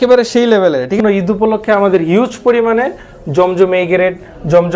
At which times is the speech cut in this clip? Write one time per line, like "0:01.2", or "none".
0:01.0